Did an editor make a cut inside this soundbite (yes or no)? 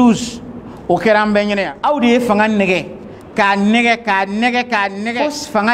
yes